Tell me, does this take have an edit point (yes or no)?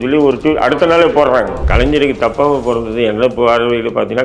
yes